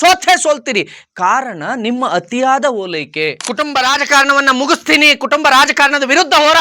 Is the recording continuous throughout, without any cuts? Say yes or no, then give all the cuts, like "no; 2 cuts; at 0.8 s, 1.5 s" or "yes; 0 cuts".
no; 1 cut; at 3.3 s